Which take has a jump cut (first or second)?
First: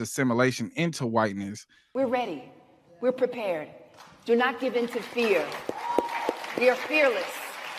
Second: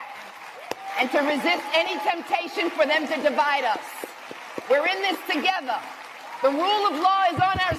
first